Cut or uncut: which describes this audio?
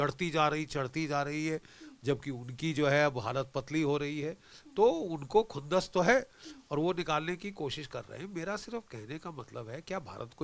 uncut